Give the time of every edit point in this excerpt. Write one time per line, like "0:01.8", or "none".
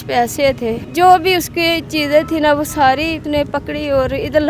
0:00.8
0:03.2